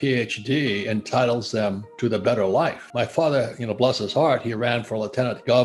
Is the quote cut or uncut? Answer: cut